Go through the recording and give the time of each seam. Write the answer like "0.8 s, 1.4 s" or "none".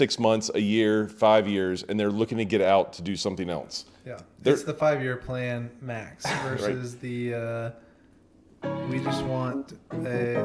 none